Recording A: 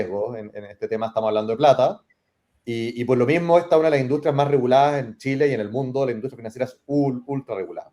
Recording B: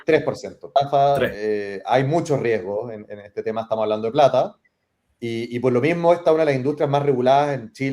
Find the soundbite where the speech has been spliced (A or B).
B